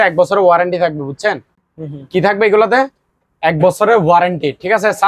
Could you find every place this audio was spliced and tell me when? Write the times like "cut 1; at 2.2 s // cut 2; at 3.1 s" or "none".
none